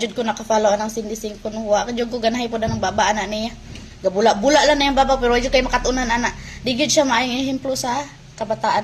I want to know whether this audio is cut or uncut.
uncut